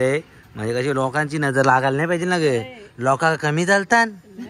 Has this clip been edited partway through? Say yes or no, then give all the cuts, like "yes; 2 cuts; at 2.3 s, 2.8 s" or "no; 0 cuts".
no; 0 cuts